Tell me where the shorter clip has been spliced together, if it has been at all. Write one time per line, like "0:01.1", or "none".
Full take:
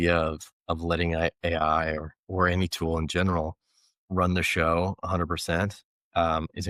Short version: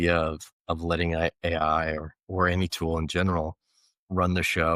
none

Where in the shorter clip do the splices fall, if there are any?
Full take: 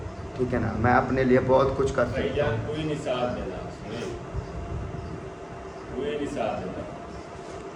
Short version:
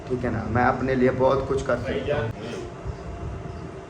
0:02.3

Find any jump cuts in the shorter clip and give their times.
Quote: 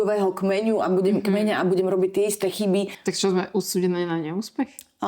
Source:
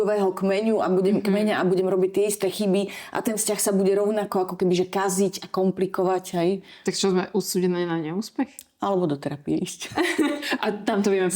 0:03.0

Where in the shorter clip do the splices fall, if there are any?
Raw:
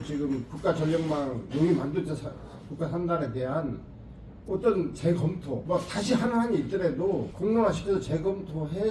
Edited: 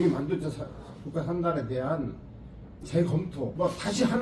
0:02.8

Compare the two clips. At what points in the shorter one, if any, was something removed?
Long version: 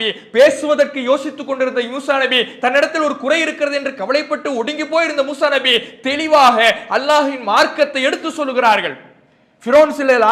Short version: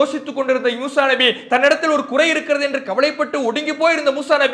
none

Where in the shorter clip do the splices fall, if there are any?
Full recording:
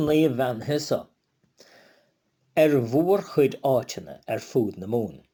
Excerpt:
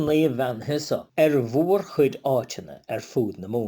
0:01.1

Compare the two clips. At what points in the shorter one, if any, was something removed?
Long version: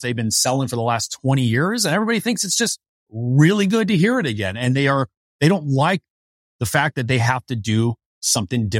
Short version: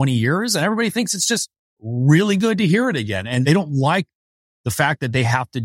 0:03.4

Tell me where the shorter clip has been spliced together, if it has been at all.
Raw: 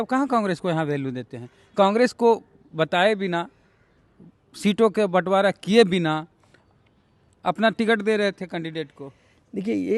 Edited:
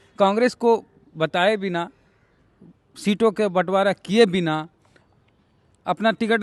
none

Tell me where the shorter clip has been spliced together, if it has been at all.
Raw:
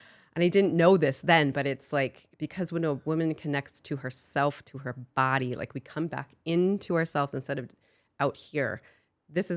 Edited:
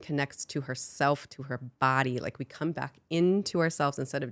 none

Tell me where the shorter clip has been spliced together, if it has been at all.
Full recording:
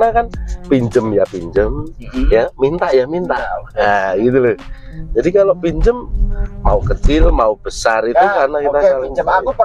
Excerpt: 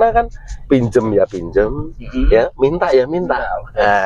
none

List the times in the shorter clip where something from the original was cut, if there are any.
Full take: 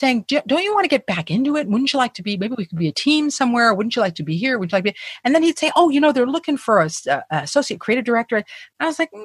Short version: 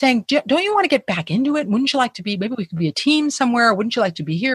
none

